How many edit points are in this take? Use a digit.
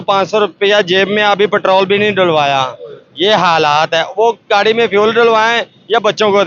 0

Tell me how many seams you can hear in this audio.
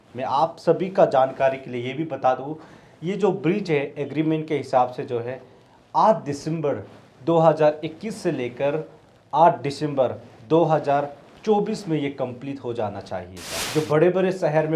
1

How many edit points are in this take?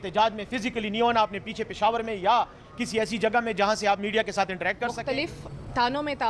1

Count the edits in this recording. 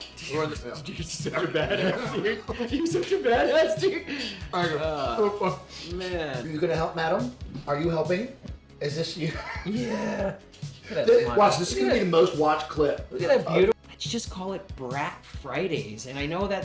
2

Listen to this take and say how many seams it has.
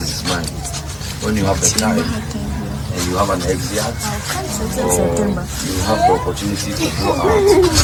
0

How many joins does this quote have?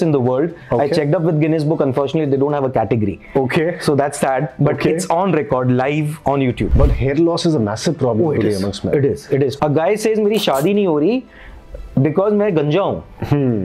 2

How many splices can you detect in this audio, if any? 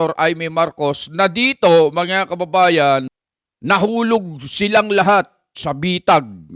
1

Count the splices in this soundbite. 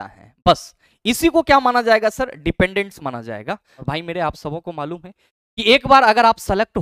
1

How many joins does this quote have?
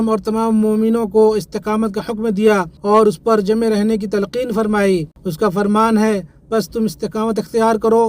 2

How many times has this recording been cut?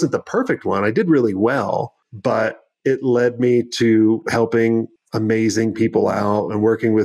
2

